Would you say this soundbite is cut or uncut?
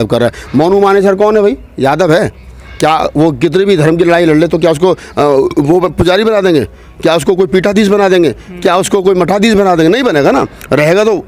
uncut